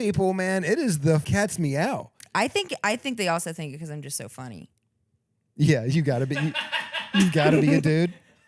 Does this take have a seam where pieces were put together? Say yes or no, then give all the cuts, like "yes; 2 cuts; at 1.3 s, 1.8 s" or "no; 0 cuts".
yes; 1 cut; at 1.2 s